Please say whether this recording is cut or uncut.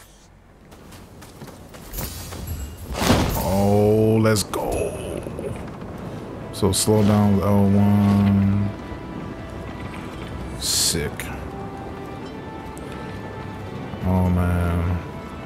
uncut